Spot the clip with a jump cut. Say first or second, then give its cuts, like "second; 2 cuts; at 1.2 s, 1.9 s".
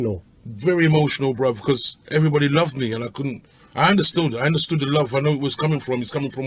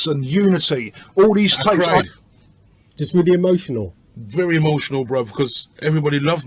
second; 1 cut; at 1.9 s